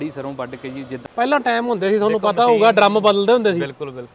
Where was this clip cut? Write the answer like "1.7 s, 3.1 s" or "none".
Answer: 1.0 s